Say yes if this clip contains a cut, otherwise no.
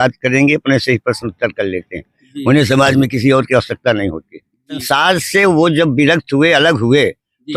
yes